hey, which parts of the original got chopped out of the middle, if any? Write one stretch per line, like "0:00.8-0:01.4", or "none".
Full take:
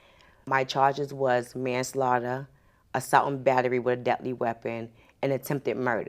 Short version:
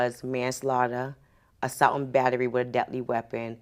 none